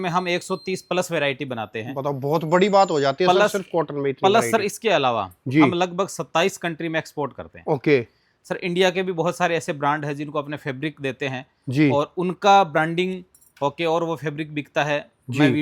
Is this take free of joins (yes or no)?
yes